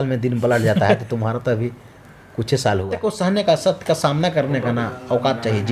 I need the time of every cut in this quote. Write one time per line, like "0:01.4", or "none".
0:03.0